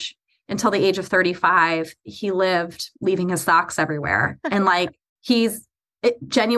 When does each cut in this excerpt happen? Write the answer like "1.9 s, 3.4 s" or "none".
5.1 s